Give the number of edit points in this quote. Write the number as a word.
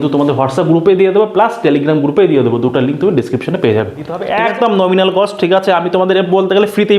one